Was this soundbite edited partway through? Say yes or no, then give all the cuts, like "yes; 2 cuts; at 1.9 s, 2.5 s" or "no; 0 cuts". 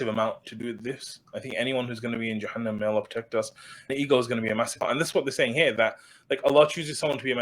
yes; 1 cut; at 3.9 s